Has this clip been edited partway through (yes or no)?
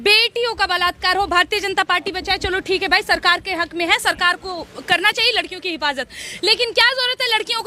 no